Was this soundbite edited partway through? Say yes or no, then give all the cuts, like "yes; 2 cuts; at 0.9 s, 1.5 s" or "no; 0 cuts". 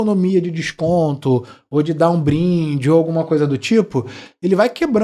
no; 0 cuts